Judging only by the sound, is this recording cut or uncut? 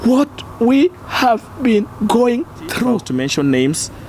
cut